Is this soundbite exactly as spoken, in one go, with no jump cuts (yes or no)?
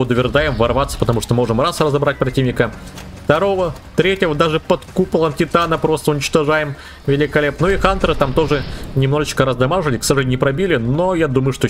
yes